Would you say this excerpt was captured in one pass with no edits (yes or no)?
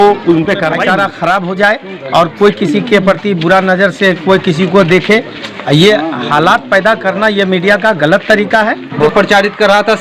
no